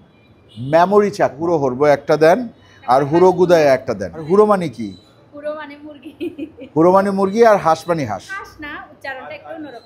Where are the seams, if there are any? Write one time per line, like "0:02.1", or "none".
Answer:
0:01.4
0:04.2
0:08.4